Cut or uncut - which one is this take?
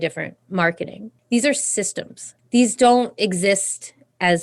cut